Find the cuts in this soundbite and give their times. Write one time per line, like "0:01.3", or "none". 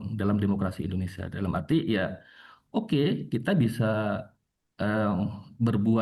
none